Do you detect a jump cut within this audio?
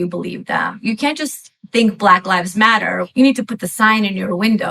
yes; 1 cut; at 3.1 s

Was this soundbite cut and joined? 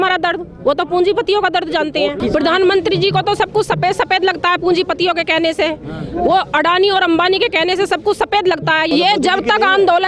yes; 2 cuts; at 2.2 s, 8.9 s

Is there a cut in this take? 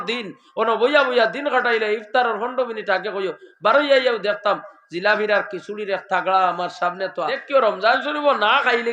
yes; 1 cut; at 7.4 s

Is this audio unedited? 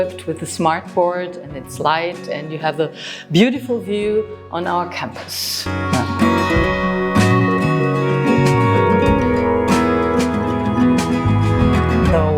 yes; 0 cuts

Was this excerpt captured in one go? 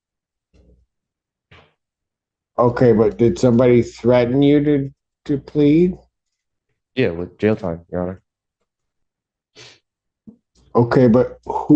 yes; 0 cuts

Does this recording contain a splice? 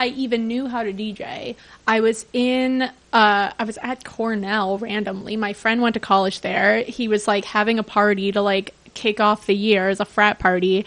no; 0 cuts

